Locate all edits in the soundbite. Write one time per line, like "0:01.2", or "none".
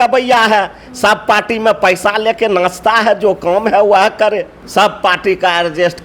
0:04.6